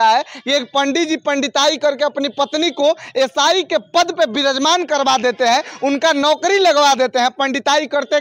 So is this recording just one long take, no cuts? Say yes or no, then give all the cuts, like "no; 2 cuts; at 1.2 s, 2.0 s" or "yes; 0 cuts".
yes; 0 cuts